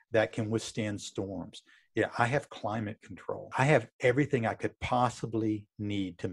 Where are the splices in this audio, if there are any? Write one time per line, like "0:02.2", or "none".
0:03.5